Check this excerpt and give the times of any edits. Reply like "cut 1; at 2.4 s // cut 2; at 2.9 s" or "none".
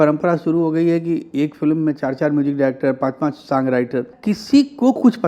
cut 1; at 4.2 s

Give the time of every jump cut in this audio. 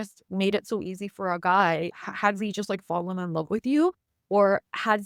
none

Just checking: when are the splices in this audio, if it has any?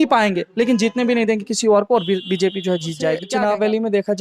cut 1; at 3.3 s

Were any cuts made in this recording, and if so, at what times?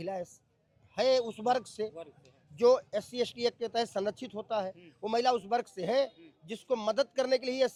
none

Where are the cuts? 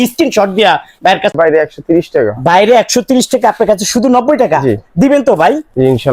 cut 1; at 1.3 s

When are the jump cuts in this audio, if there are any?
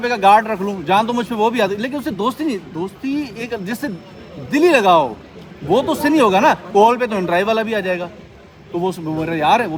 none

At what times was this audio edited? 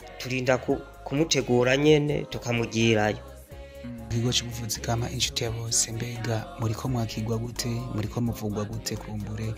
cut 1; at 4.1 s

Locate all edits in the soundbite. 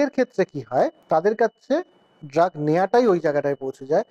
cut 1; at 1.0 s

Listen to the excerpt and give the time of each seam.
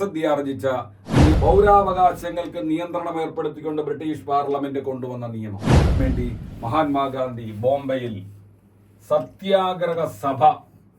cut 1; at 1.3 s // cut 2; at 6.0 s

